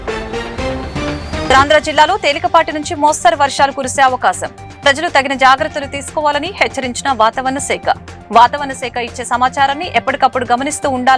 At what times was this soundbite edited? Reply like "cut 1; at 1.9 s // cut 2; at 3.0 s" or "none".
cut 1; at 1.5 s